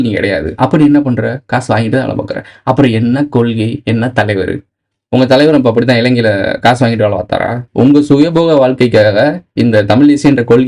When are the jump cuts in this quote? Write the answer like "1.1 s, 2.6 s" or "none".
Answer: 7.6 s

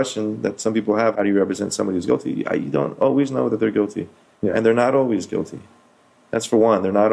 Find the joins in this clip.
1.1 s

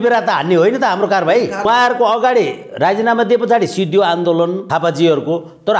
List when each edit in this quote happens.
1.7 s, 4.6 s

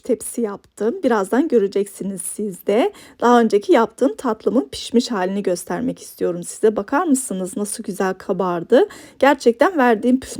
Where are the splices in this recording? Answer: none

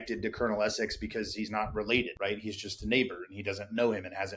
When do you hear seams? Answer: 2.1 s

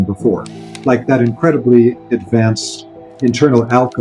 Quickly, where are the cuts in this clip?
none

